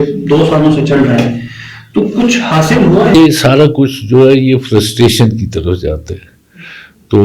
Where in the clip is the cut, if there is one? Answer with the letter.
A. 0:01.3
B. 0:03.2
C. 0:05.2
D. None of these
B